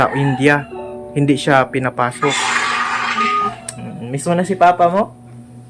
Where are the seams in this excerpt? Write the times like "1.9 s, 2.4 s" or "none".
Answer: 3.5 s